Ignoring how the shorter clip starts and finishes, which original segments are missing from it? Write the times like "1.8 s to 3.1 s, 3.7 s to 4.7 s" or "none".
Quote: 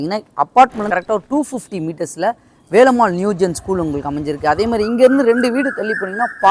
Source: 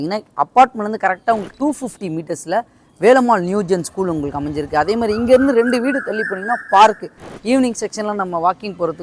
1.0 s to 1.3 s